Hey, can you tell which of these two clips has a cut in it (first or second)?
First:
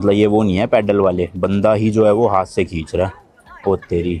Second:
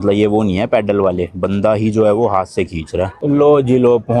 second